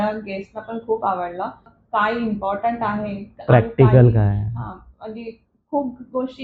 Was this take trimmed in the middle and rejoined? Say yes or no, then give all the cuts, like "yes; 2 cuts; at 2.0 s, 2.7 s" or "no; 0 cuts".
yes; 1 cut; at 1.8 s